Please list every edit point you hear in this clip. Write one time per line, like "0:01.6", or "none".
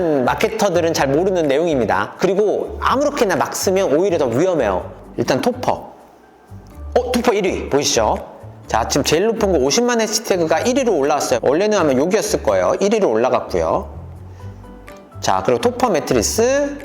0:04.9